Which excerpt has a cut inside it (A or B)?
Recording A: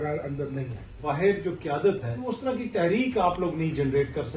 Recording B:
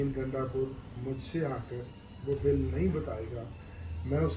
A